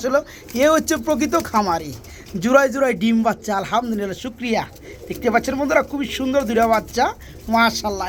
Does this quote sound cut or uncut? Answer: uncut